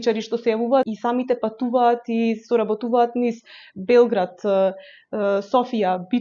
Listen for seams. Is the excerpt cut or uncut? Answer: cut